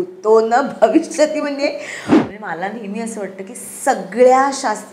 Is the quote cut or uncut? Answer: cut